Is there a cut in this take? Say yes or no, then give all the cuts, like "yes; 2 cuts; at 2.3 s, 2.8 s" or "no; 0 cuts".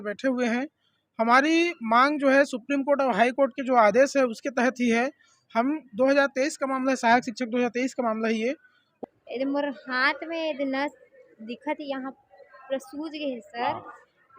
yes; 1 cut; at 8.8 s